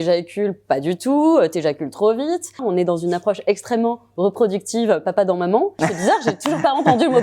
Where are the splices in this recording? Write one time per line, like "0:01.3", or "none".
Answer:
0:02.6
0:05.8